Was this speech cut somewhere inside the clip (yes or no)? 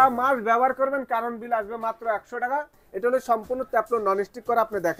yes